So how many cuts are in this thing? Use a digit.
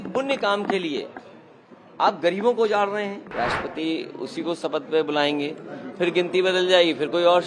1